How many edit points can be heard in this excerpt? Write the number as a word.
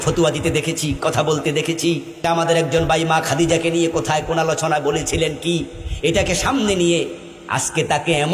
one